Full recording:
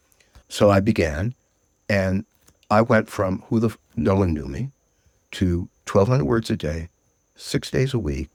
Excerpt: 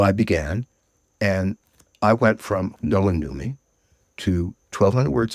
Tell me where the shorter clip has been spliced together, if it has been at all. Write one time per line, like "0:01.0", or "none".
0:02.7